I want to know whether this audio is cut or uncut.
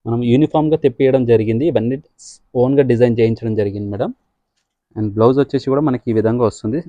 uncut